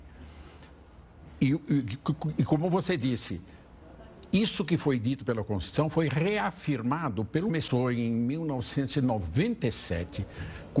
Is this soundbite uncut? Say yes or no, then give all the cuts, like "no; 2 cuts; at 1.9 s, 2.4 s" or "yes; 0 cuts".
yes; 0 cuts